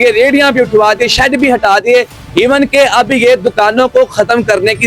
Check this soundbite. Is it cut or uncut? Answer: uncut